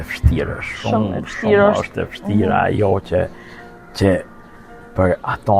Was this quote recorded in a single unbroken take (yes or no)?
yes